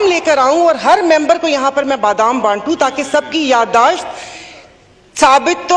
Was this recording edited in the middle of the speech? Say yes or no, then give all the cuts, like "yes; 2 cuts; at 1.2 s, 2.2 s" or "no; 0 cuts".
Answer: no; 0 cuts